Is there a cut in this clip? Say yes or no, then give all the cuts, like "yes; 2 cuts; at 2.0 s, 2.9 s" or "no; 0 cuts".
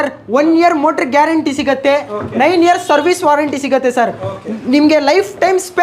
no; 0 cuts